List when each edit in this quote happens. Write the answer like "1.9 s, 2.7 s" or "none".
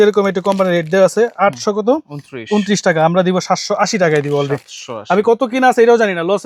none